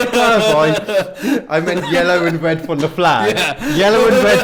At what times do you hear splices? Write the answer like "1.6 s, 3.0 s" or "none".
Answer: none